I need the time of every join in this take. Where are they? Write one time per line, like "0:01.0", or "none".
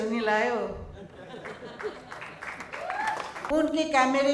0:03.4